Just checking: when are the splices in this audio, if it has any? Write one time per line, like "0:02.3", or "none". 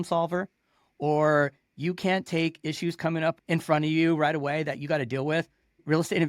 none